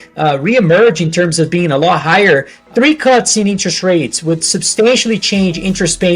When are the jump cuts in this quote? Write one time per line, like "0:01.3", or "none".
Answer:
0:02.6